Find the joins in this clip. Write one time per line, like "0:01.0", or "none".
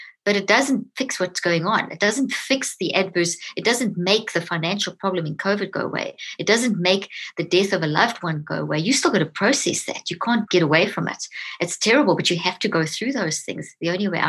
0:10.5

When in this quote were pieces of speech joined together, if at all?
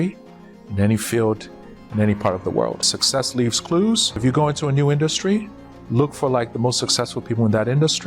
0:03.0
0:04.2

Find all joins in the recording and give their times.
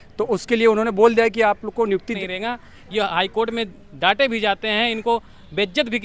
0:02.2

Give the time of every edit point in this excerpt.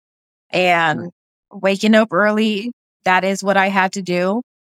0:01.4
0:03.0

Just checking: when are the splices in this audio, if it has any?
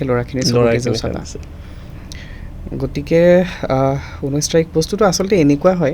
none

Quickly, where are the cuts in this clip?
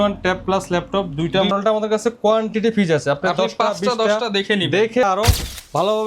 0:01.5
0:05.0

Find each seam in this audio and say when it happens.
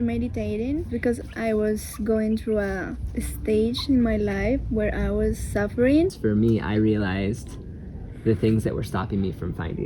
0:01.2
0:06.2

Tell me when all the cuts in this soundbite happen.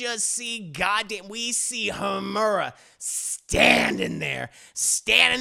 none

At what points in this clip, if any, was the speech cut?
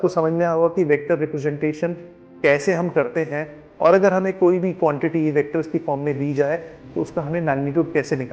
none

